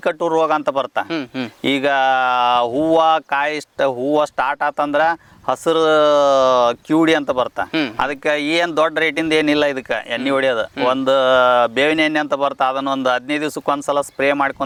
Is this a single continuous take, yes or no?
yes